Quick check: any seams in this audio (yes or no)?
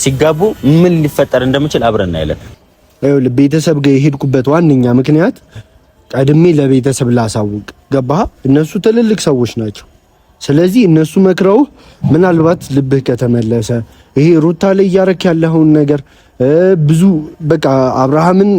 yes